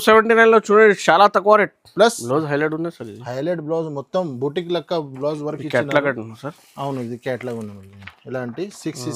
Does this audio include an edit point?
yes; 1 cut; at 2.2 s

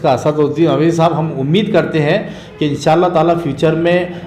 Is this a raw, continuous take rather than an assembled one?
yes; 0 cuts

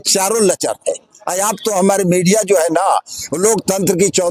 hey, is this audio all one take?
yes; 0 cuts

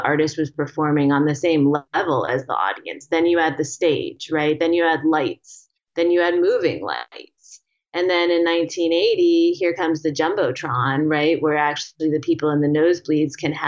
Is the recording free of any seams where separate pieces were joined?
yes; 0 cuts

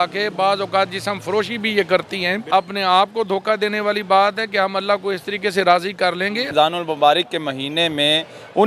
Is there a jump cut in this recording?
yes; 2 cuts; at 2.4 s, 6.5 s

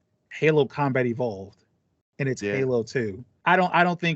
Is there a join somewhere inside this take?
yes; 1 cut; at 3.2 s

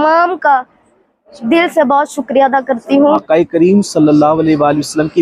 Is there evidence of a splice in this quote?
yes; 1 cut; at 3.2 s

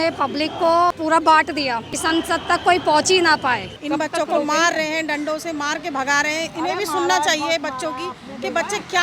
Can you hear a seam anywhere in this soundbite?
yes; 3 cuts; at 1.0 s, 1.9 s, 3.7 s

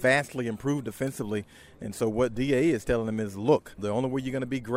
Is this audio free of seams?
no; 1 cut; at 3.8 s

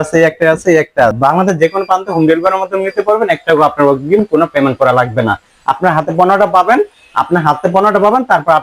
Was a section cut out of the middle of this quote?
yes; 1 cut; at 1.2 s

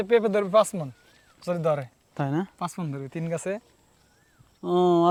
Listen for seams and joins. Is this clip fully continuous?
yes; 0 cuts

